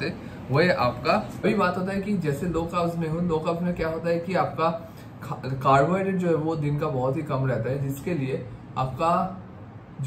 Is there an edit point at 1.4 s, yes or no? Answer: yes